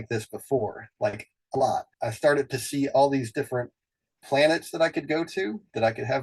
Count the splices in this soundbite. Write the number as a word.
one